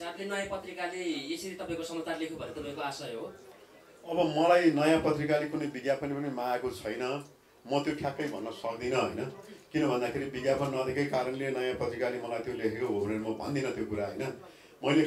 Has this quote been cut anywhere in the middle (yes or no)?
no